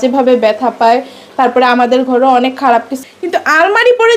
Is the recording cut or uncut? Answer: cut